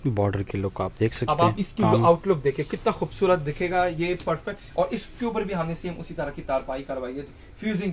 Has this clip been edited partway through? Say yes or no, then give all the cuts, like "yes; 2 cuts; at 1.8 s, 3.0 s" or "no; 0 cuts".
no; 0 cuts